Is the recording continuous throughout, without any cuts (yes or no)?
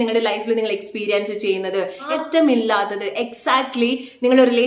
no